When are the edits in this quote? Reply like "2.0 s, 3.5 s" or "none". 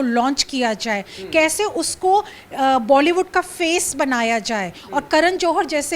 none